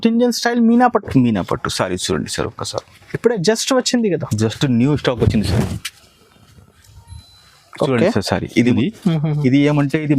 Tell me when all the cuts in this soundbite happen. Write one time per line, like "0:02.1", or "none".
0:08.7